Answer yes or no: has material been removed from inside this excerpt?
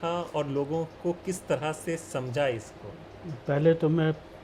no